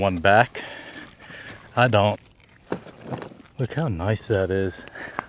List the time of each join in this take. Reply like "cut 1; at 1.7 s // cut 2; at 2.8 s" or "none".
cut 1; at 2.2 s // cut 2; at 3.4 s